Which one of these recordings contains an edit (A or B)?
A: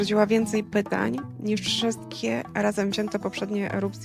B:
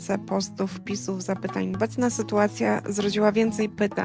B